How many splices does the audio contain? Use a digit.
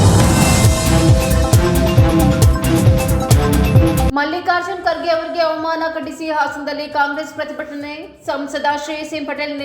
1